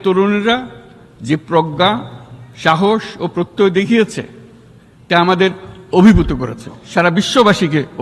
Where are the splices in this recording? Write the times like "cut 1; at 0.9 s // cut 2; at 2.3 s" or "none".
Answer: none